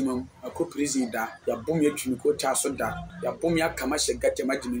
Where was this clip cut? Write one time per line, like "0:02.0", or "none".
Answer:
0:01.3
0:03.1